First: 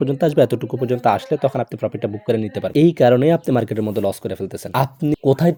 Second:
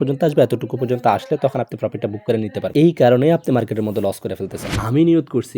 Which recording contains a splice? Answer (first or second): second